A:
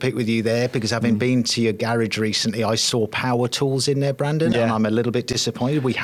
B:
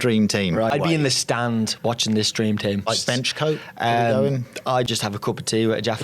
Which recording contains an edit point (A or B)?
B